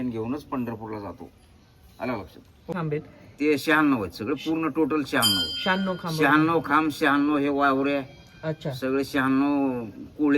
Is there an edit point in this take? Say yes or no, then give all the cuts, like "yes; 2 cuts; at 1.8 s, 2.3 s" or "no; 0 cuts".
yes; 1 cut; at 2.7 s